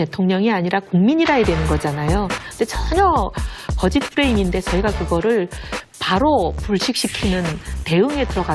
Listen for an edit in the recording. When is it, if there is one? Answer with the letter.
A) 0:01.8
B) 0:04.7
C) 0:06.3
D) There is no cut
C